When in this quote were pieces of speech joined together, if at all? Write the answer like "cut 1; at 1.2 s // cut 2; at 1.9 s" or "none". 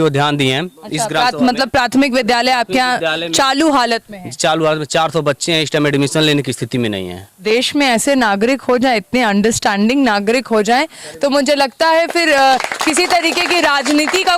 cut 1; at 7.4 s